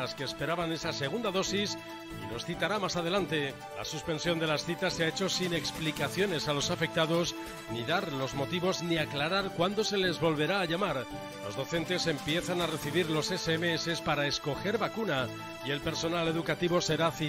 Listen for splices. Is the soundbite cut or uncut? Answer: uncut